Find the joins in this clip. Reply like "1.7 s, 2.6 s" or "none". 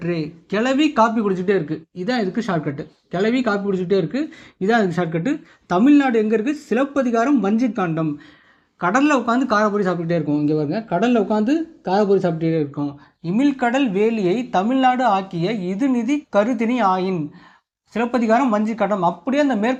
none